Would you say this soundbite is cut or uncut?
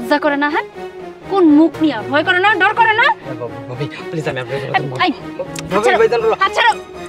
uncut